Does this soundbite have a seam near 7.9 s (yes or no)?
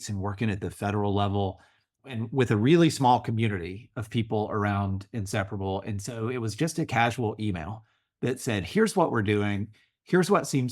no